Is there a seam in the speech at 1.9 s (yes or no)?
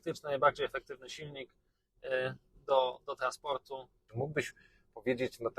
no